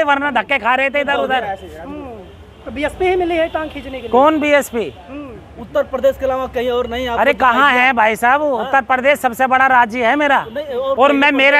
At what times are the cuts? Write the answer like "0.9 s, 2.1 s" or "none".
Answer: none